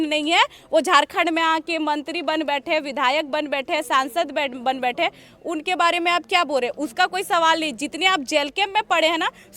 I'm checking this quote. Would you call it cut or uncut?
uncut